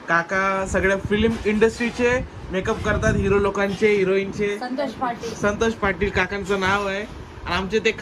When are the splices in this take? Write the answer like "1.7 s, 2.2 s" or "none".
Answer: none